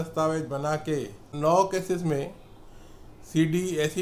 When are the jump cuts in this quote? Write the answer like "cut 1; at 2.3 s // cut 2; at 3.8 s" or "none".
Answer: cut 1; at 1.3 s